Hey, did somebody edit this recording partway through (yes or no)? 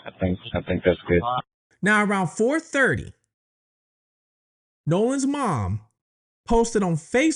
no